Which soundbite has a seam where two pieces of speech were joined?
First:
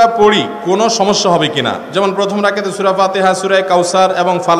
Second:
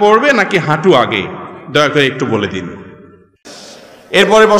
second; 1 cut; at 3.5 s

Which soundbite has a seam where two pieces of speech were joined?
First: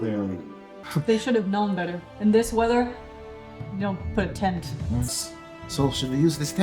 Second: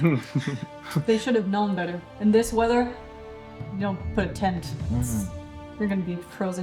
first; 1 cut; at 5.1 s

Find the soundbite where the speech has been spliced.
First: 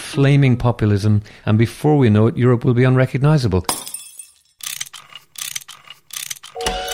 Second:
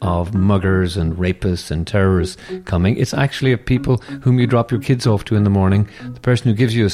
first; 2 cuts; at 1.3 s, 3.8 s

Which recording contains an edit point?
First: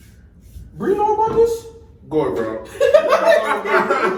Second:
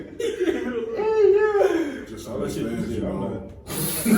second; 1 cut; at 2.1 s

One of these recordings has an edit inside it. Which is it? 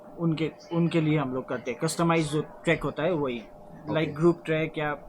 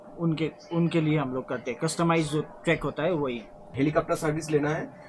second; 1 cut; at 3.7 s

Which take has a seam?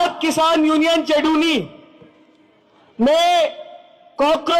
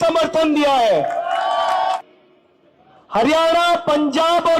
second; 1 cut; at 2.0 s

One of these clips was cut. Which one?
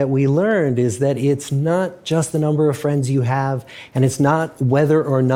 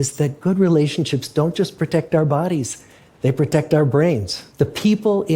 second; 1 cut; at 4.4 s

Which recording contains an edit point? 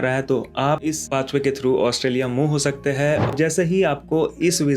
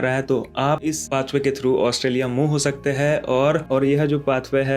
first; 1 cut; at 3.3 s

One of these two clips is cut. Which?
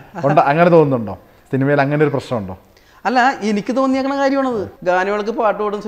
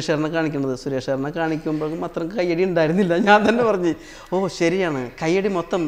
first; 1 cut; at 4.7 s

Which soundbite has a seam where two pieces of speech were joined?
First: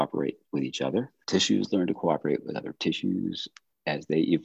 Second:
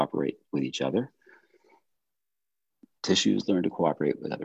first; 1 cut; at 1.2 s

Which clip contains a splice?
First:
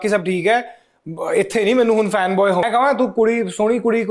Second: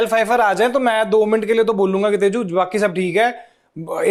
first; 1 cut; at 2.7 s

